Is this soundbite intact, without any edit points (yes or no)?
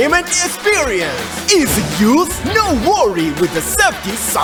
yes